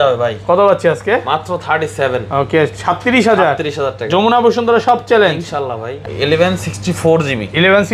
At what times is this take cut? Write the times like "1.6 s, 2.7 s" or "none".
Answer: 5.9 s